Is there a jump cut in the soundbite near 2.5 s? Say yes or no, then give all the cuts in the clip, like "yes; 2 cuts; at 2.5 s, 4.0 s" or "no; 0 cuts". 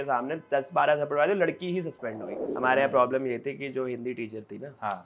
yes; 1 cut; at 2.5 s